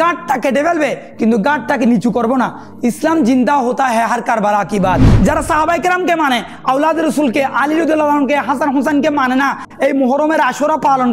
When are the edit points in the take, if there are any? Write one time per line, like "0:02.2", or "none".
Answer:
0:05.1